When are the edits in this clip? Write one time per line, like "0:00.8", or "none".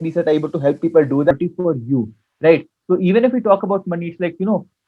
0:01.3

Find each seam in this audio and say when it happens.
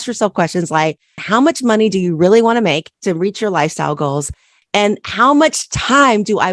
0:01.2
0:02.9

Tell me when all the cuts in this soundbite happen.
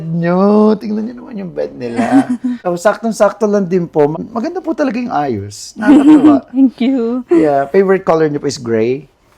0:02.6
0:04.1

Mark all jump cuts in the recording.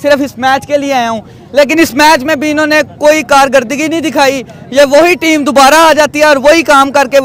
none

